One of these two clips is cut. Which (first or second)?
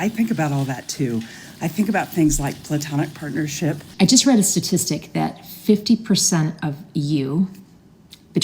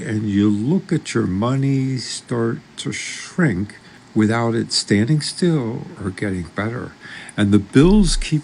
first